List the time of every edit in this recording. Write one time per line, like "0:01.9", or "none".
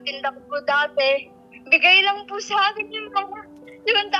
none